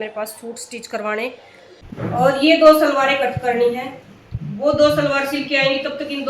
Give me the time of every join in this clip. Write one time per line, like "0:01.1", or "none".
0:01.8